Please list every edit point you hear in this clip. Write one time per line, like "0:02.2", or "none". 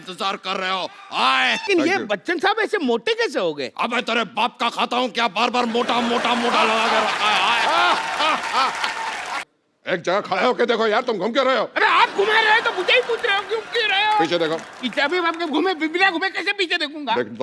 0:01.6
0:09.4